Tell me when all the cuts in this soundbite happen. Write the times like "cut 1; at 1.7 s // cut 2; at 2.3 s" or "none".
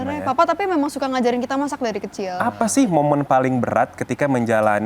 cut 1; at 2.3 s